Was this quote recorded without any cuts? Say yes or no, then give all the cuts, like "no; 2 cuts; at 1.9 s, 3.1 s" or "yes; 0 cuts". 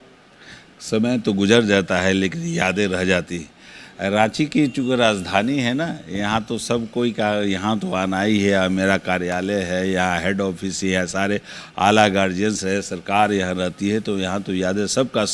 yes; 0 cuts